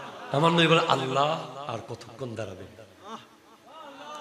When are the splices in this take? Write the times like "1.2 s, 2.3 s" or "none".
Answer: 1.7 s